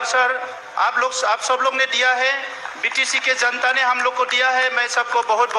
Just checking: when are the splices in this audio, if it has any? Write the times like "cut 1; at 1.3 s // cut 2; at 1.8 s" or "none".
none